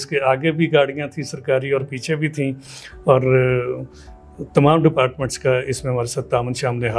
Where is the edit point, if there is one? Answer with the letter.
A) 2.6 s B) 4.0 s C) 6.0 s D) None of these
D